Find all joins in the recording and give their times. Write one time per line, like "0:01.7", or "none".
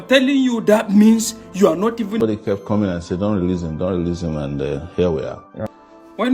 0:02.2